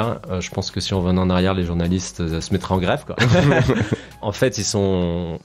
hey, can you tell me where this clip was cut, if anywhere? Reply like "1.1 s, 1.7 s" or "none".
2.4 s, 4.2 s